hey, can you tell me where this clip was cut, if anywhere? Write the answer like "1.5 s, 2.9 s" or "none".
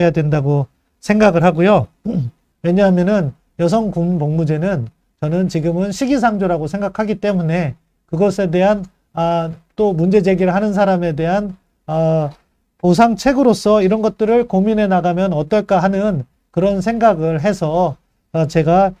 2.4 s